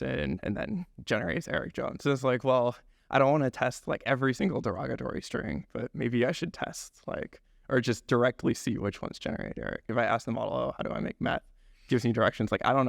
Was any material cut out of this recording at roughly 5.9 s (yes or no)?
no